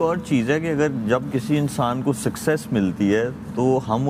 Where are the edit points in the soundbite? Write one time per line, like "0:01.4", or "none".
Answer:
none

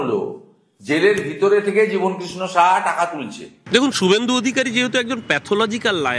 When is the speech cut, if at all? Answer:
0:03.6

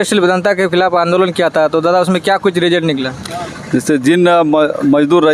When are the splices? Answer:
none

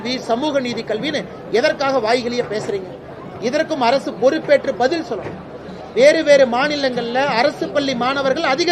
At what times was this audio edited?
none

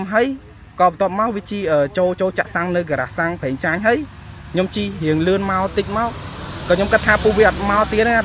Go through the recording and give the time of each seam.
none

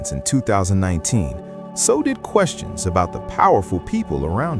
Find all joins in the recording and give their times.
none

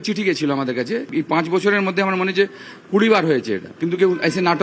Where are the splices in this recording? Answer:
0:01.1

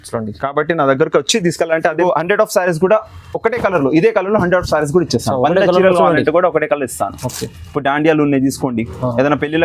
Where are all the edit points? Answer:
0:02.0

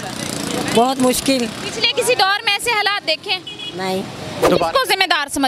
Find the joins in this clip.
0:04.3

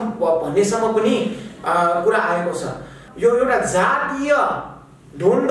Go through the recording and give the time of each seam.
0:03.0

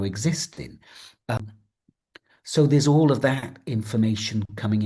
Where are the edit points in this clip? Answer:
0:01.4

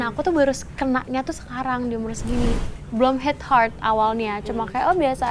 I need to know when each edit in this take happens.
0:02.6

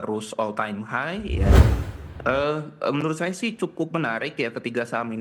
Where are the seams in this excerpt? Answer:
0:01.5

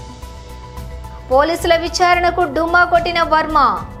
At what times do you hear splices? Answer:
none

